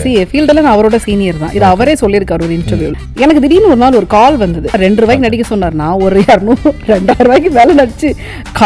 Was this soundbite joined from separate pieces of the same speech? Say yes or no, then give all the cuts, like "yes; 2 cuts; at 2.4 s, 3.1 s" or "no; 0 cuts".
yes; 2 cuts; at 3.0 s, 4.8 s